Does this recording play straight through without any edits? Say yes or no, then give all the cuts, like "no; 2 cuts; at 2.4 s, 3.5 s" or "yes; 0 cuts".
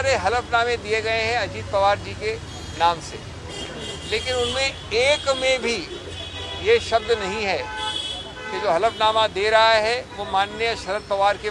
yes; 0 cuts